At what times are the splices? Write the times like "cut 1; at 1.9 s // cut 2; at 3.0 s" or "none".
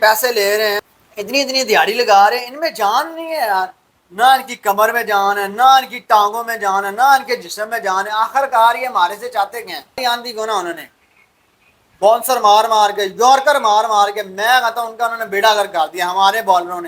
cut 1; at 10.0 s